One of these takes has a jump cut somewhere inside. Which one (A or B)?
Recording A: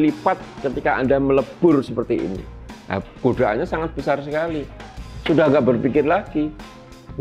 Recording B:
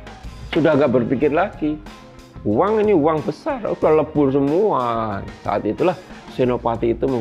B